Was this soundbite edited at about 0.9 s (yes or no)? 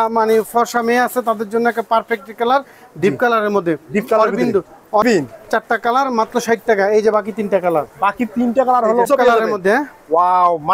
no